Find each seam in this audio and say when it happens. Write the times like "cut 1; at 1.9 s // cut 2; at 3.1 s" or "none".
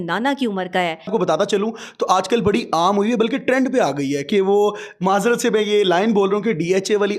cut 1; at 1.1 s